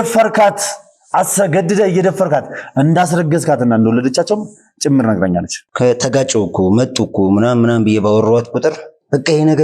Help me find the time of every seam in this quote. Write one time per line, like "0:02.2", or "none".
0:05.6